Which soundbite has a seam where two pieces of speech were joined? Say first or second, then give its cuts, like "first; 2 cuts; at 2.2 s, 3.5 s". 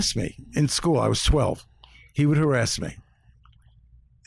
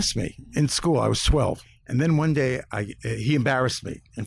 second; 1 cut; at 1.7 s